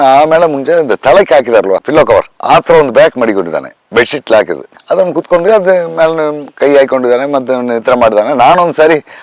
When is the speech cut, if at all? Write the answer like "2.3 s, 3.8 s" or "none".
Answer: none